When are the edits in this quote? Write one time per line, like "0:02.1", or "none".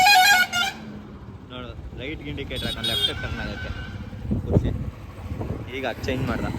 none